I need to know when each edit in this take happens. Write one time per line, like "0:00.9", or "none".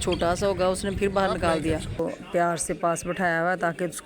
0:02.0